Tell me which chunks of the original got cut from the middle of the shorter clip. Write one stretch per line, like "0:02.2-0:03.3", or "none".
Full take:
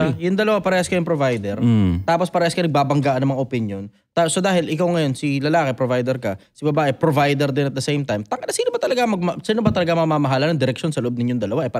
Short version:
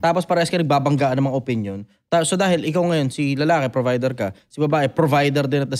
none